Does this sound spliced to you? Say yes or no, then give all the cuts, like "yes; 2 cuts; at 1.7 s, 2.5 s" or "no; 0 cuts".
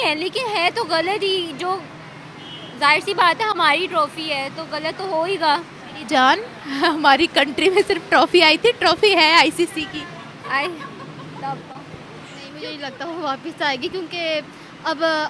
yes; 1 cut; at 12.7 s